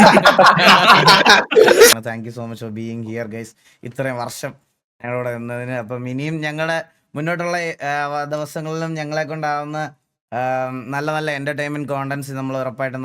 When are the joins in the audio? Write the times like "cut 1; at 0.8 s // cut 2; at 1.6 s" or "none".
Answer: cut 1; at 1.9 s